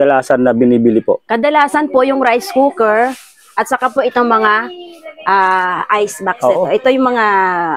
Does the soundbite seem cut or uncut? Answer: uncut